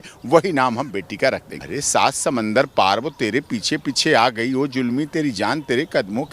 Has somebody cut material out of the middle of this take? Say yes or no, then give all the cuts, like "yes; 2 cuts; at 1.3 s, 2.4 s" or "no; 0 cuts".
yes; 1 cut; at 1.6 s